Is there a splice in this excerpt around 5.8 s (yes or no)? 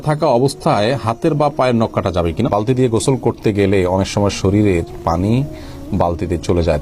no